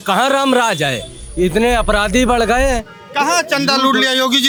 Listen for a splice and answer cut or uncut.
uncut